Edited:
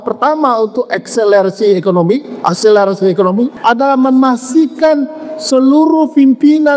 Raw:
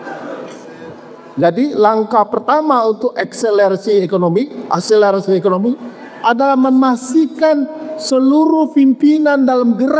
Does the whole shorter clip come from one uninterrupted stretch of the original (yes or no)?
no